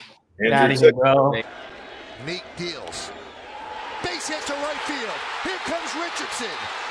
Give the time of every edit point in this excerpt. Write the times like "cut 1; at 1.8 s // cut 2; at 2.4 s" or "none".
cut 1; at 1.4 s